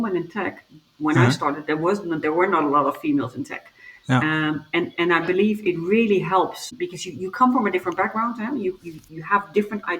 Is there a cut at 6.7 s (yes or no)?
yes